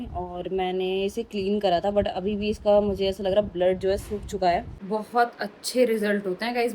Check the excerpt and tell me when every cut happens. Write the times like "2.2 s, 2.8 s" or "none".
4.8 s